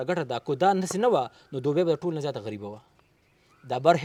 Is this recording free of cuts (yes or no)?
yes